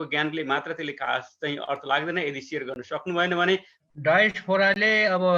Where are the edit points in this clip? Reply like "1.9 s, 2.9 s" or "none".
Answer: 3.8 s